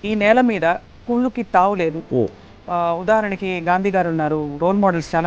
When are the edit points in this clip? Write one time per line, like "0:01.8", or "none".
none